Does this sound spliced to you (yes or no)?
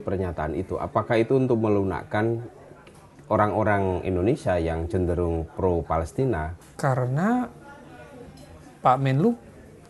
no